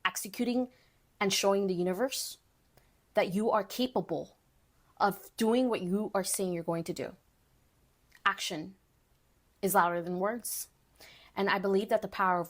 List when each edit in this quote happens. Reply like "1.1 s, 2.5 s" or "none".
none